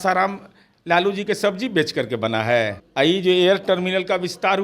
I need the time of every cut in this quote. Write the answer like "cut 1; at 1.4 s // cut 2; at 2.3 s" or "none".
cut 1; at 2.8 s